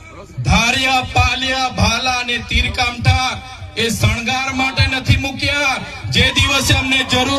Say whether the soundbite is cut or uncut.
uncut